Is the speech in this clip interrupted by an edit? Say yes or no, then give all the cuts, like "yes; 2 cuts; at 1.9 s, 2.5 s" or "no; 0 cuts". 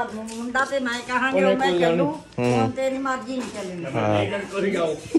no; 0 cuts